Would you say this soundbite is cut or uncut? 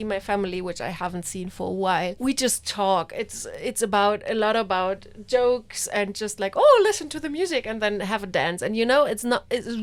uncut